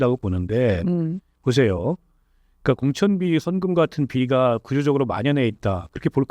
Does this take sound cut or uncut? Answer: uncut